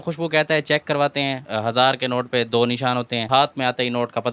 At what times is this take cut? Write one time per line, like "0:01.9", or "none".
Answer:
0:01.4
0:03.3